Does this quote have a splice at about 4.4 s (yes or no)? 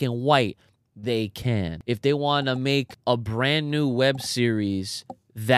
no